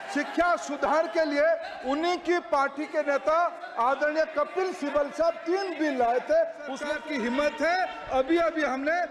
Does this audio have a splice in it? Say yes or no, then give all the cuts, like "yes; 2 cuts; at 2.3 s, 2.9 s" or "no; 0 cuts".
yes; 1 cut; at 6.8 s